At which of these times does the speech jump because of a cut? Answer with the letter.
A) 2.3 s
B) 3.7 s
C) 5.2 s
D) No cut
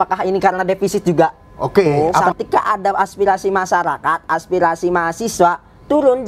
A